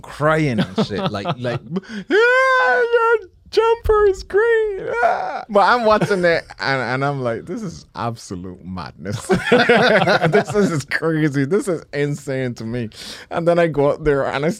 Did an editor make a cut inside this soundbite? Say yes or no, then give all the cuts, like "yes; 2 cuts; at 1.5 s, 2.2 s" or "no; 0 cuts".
yes; 1 cut; at 5.4 s